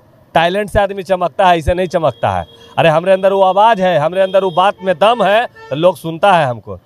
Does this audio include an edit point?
no; 0 cuts

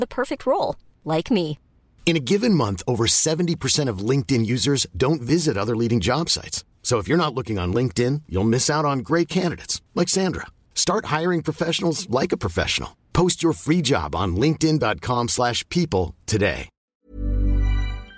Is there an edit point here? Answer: yes; 1 cut; at 16.9 s

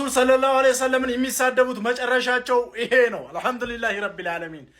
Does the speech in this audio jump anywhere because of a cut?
no; 0 cuts

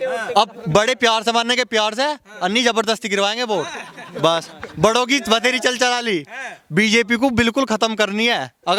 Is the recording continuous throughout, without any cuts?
yes; 0 cuts

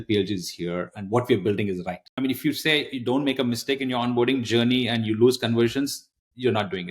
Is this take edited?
yes; 1 cut; at 2.2 s

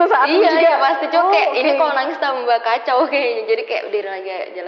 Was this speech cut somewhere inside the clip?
no; 0 cuts

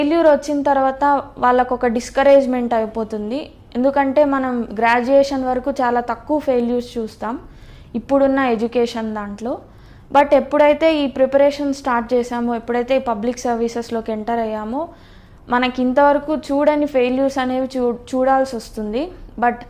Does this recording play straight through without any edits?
yes; 0 cuts

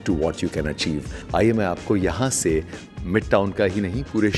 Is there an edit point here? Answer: yes; 1 cut; at 1.1 s

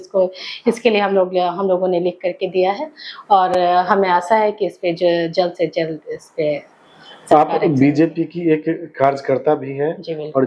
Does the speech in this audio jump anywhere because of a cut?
no; 0 cuts

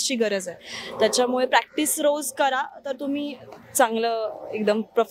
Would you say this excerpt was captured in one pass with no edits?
yes; 0 cuts

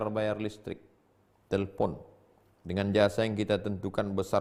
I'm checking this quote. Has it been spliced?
no; 0 cuts

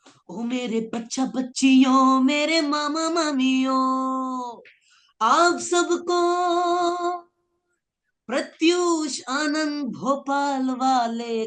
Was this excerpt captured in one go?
yes; 0 cuts

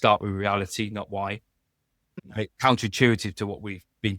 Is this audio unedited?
no; 1 cut; at 2.1 s

